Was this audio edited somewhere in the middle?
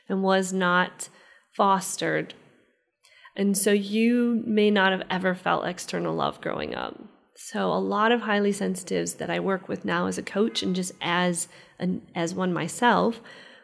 no; 0 cuts

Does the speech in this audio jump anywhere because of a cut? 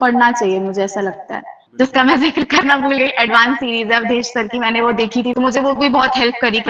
yes; 2 cuts; at 1.6 s, 5.3 s

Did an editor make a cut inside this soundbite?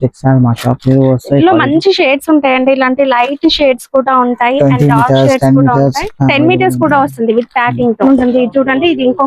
yes; 1 cut; at 8.0 s

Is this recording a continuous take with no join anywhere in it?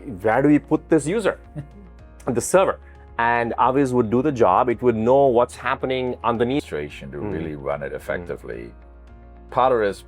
no; 1 cut; at 6.7 s

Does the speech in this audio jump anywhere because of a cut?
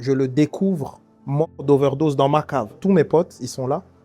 yes; 1 cut; at 2.8 s

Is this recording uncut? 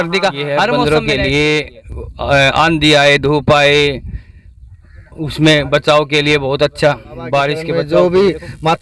no; 2 cuts; at 0.7 s, 7.6 s

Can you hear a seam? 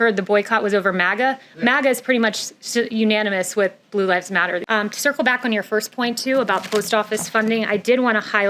yes; 1 cut; at 4.6 s

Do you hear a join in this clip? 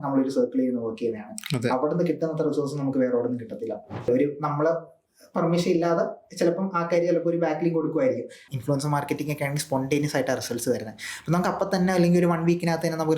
yes; 2 cuts; at 4.1 s, 8.4 s

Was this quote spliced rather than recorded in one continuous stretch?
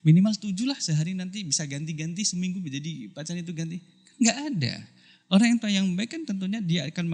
no; 0 cuts

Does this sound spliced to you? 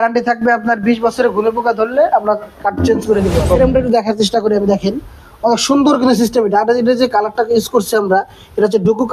yes; 1 cut; at 3.6 s

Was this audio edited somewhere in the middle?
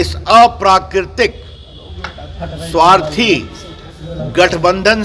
no; 0 cuts

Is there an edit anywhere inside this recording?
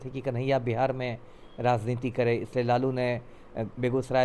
no; 0 cuts

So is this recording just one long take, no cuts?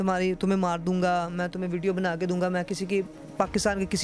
yes; 0 cuts

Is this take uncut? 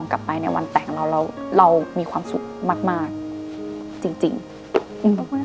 yes; 0 cuts

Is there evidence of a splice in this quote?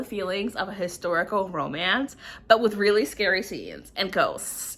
no; 0 cuts

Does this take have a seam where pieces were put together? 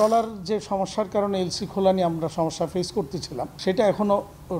yes; 1 cut; at 3.5 s

